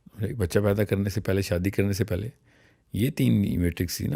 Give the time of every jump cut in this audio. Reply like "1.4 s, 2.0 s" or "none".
none

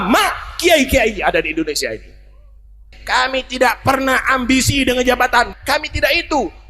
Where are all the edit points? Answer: 2.9 s, 5.5 s

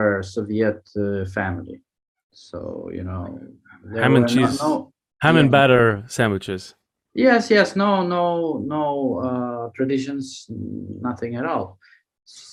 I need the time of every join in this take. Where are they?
none

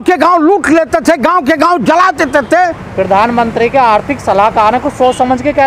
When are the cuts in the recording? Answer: 2.8 s

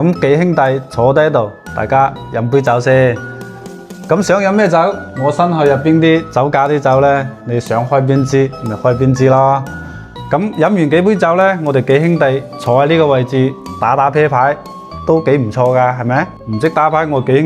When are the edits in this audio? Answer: 16.4 s

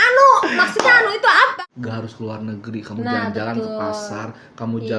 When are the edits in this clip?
1.5 s

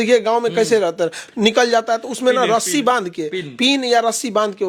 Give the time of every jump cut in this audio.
none

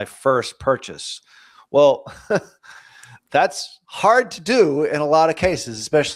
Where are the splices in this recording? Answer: none

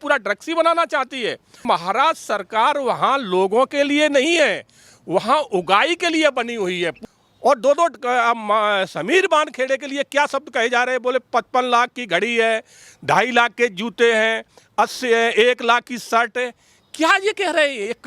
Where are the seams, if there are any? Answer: 1.6 s, 7.0 s

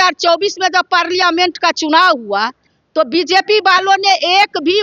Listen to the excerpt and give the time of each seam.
none

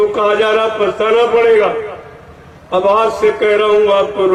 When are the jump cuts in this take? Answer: none

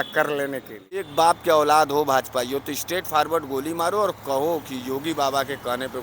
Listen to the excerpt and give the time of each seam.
1.1 s

